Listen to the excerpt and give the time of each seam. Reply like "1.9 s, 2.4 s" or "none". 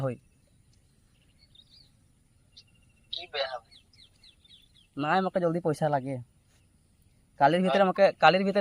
none